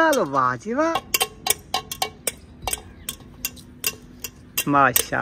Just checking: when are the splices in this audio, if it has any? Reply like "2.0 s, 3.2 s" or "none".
0.9 s